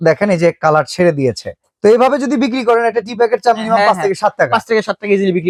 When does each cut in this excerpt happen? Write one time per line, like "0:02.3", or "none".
none